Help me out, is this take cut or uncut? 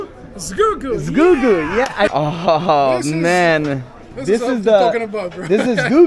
cut